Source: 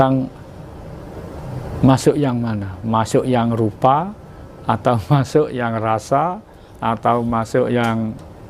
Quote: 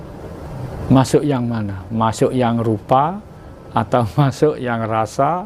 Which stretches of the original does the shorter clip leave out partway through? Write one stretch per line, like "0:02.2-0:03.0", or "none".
none